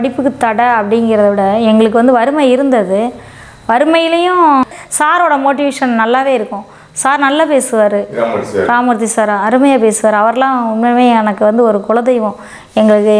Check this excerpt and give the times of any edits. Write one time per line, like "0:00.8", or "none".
0:04.8